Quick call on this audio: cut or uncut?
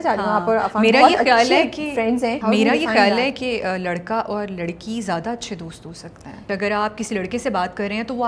cut